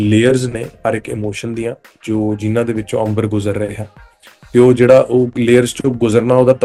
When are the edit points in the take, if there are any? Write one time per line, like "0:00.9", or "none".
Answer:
none